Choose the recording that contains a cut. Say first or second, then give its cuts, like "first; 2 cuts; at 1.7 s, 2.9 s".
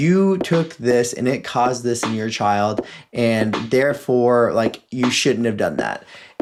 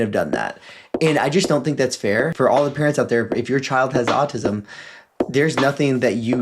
second; 1 cut; at 2.3 s